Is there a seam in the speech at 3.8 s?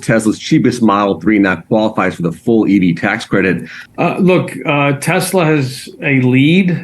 yes; 1 cut; at 3.8 s

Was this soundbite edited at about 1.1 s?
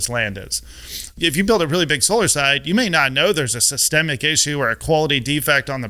yes; 1 cut; at 1.1 s

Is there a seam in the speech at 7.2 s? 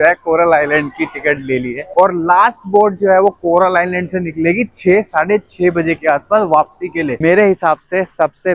yes; 2 cuts; at 1.9 s, 7.2 s

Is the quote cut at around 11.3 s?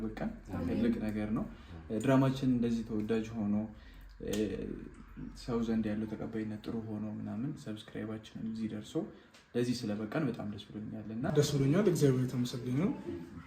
yes; 1 cut; at 11.3 s

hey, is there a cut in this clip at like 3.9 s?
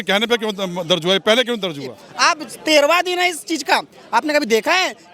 no; 1 cut; at 2.0 s

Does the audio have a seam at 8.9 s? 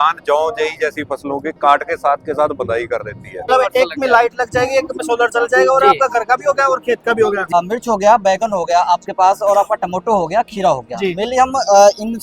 no; 2 cuts; at 3.5 s, 7.5 s

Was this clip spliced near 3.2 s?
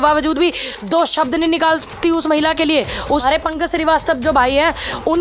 yes; 1 cut; at 3.2 s

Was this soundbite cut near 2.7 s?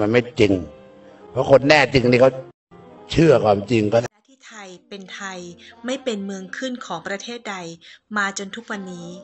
no; 1 cut; at 4.0 s

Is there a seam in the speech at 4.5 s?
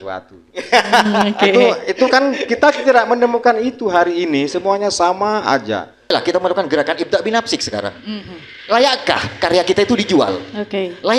no; 1 cut; at 6.1 s

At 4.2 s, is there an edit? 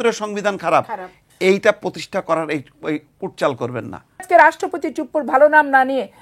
yes; 1 cut; at 4.2 s

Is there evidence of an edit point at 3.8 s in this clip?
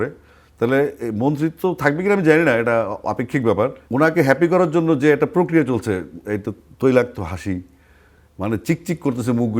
yes; 1 cut; at 3.8 s

